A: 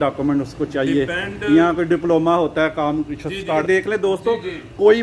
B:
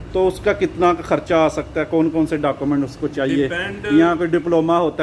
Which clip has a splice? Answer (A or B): A